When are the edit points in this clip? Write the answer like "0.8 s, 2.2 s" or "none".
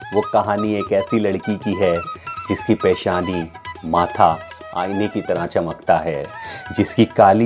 6.4 s